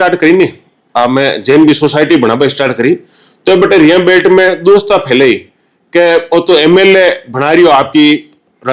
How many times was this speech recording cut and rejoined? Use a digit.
0